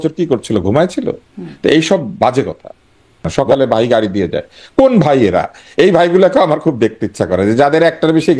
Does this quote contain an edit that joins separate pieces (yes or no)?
yes